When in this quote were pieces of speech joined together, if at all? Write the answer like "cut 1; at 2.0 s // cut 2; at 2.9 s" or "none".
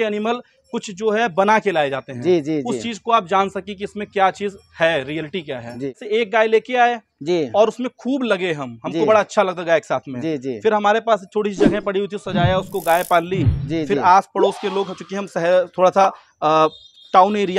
none